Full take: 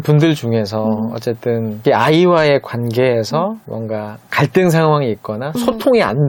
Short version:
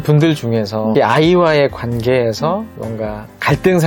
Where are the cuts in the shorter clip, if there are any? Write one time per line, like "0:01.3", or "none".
0:00.9

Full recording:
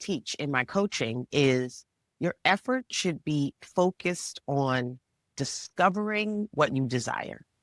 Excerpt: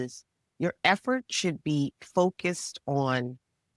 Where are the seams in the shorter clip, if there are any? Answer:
none

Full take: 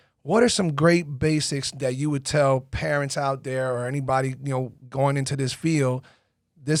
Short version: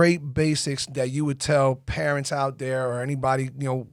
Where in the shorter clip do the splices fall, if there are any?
none

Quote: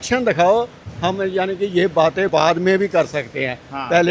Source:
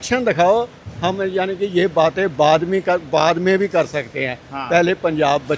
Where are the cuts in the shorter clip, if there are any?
0:02.3

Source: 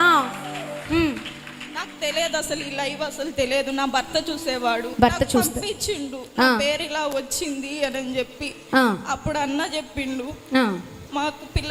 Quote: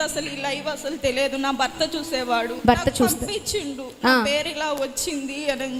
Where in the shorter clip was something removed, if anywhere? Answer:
none

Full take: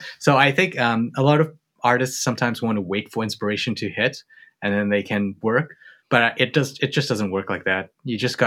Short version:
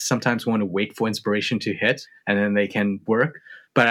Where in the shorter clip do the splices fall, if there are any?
0:02.1

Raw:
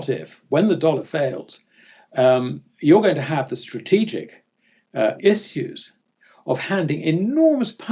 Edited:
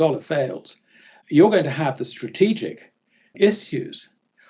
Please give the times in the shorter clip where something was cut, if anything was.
0:01.1
0:03.3

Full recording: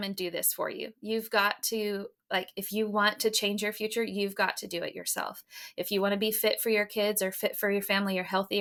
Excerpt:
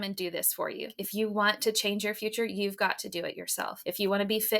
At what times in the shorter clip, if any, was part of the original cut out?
0:01.0
0:03.8

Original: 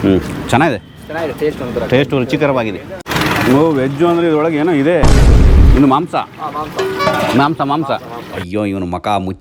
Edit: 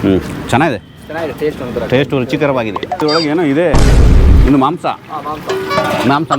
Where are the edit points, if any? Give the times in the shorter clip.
0:03.0

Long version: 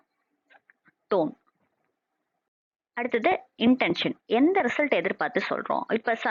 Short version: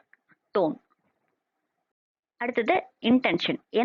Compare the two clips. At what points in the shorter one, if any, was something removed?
none

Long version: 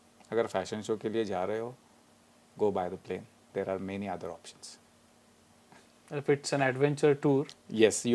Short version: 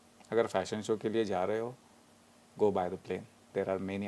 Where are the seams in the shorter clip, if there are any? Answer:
none

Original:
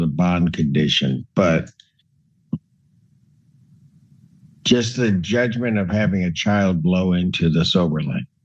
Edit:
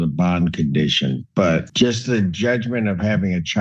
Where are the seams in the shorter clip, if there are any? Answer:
0:01.7

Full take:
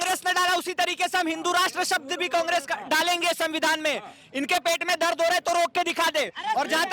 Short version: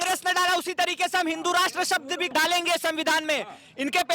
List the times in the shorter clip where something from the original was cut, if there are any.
0:02.3

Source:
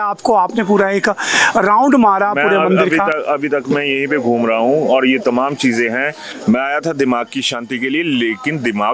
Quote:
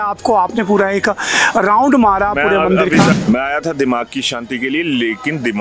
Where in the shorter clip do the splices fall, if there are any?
0:03.2

